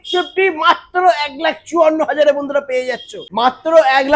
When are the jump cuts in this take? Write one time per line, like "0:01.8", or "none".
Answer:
0:03.2